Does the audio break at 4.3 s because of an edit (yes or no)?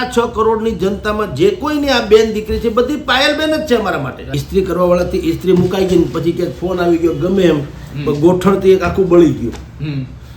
yes